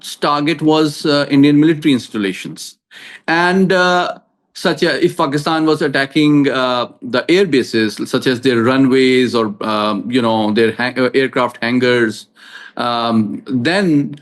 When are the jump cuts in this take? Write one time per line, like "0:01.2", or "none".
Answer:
none